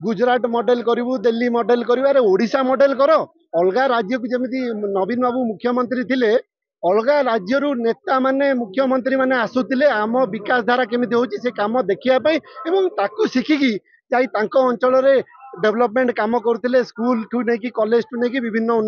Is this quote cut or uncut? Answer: uncut